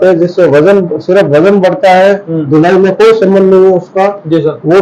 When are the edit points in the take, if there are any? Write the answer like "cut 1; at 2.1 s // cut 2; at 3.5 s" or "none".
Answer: cut 1; at 2.3 s